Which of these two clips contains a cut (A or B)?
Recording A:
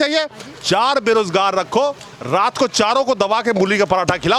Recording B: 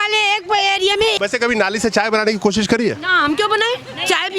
B